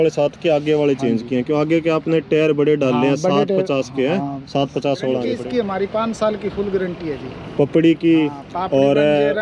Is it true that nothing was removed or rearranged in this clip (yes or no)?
no